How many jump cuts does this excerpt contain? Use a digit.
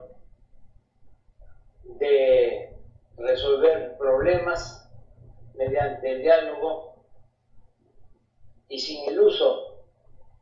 0